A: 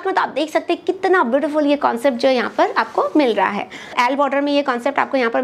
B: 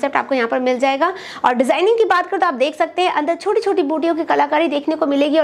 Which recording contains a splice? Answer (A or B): A